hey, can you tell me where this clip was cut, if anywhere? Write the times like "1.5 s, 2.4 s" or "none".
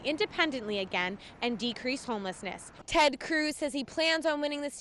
2.8 s